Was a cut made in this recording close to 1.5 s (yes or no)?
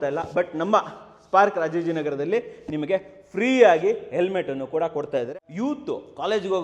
no